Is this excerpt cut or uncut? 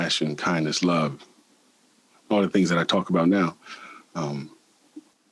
uncut